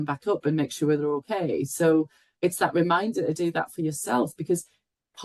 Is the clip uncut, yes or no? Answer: yes